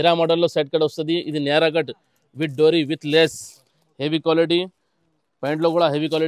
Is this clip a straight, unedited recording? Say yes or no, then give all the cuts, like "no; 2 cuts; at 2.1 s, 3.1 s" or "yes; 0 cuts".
yes; 0 cuts